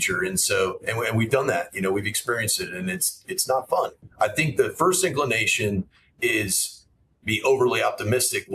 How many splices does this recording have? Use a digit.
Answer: 1